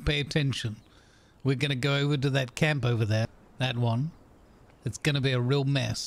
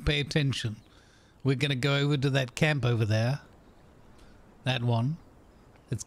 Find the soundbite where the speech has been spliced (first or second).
first